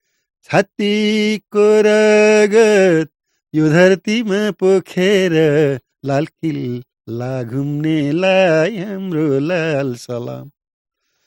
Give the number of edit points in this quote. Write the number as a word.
zero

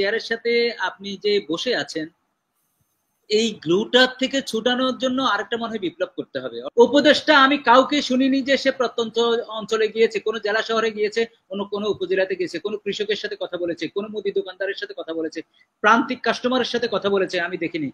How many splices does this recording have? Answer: one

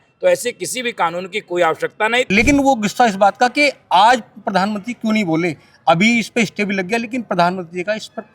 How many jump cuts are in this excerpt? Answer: one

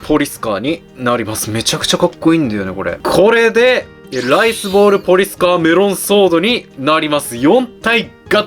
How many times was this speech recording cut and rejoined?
one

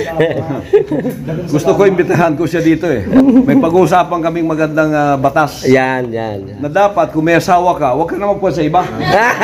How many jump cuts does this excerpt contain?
one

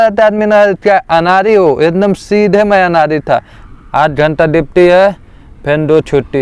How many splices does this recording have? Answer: one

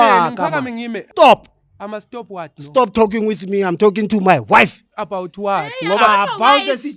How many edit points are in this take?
one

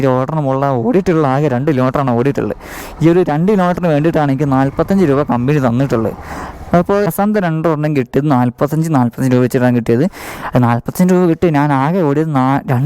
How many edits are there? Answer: one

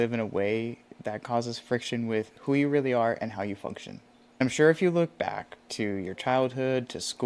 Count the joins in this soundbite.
one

